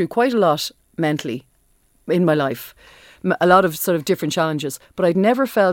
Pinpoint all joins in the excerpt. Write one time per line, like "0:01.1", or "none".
none